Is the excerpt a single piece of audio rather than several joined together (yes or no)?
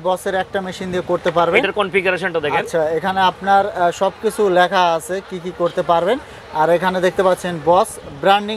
yes